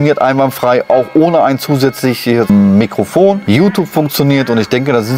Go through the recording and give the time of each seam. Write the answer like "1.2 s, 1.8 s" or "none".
2.5 s, 3.4 s